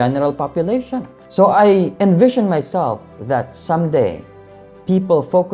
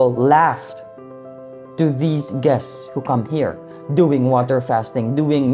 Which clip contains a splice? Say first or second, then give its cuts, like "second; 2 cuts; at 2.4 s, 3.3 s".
first; 1 cut; at 1.2 s